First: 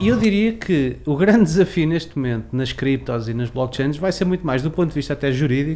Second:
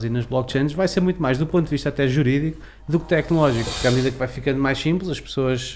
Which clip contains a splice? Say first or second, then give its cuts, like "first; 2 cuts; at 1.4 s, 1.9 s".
second; 1 cut; at 3.7 s